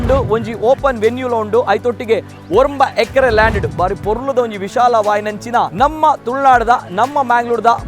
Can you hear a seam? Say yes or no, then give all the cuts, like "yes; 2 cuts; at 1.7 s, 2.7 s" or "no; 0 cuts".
yes; 1 cut; at 5.7 s